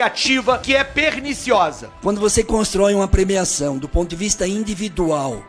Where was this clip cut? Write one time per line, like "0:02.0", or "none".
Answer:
0:01.9